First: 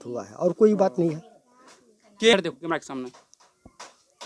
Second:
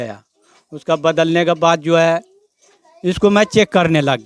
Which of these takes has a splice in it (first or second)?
first